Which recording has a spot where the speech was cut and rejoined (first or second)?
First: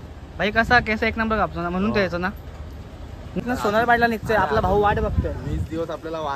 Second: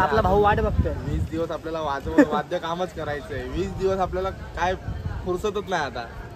first